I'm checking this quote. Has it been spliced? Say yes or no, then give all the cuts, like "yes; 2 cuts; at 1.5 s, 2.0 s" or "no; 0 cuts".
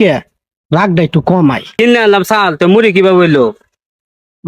yes; 1 cut; at 1.7 s